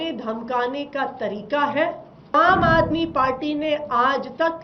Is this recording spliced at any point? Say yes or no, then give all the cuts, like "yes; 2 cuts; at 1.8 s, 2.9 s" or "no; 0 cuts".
yes; 1 cut; at 2.3 s